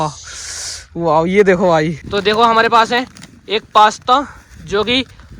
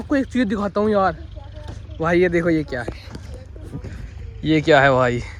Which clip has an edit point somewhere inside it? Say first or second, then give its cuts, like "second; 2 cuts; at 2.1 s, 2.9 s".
first; 1 cut; at 2.0 s